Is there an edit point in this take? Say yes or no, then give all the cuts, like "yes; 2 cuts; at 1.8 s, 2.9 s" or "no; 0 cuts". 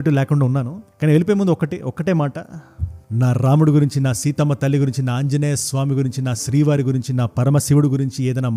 no; 0 cuts